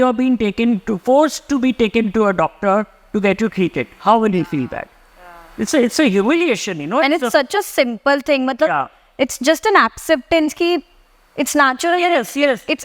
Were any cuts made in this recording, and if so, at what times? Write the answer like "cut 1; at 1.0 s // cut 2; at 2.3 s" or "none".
none